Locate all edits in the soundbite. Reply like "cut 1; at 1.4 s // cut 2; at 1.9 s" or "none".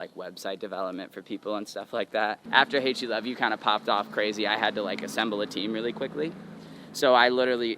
cut 1; at 2.4 s